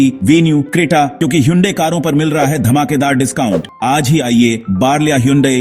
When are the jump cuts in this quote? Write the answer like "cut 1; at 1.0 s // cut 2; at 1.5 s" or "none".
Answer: cut 1; at 1.1 s // cut 2; at 3.7 s